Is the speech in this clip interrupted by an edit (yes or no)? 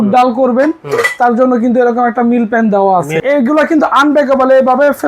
yes